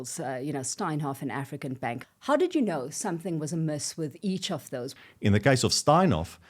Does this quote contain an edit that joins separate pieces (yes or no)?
yes